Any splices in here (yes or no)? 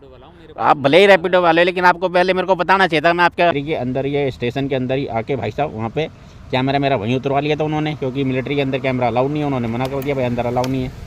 yes